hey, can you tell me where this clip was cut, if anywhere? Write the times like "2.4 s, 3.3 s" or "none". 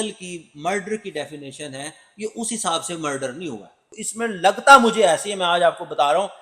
4.1 s